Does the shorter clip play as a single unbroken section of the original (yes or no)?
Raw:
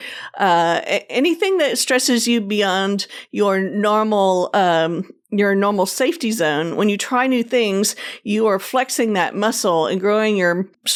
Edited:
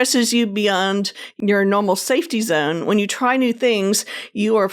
no